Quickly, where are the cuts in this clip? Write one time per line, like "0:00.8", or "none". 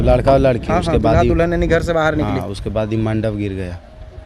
none